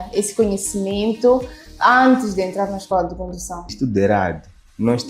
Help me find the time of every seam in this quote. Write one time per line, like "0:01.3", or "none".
0:03.8